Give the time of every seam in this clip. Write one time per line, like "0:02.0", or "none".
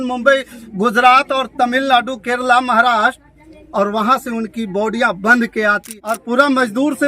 0:05.8